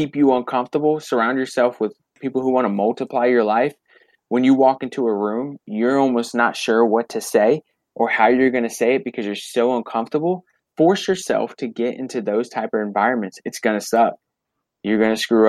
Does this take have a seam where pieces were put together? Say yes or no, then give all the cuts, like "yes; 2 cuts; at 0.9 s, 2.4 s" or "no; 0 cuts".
yes; 2 cuts; at 5.7 s, 10.6 s